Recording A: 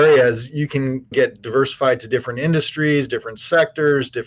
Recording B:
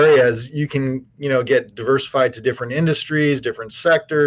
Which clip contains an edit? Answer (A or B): A